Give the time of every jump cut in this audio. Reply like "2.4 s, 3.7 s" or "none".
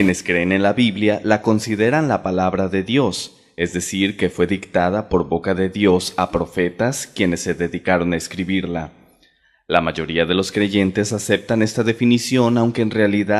1.4 s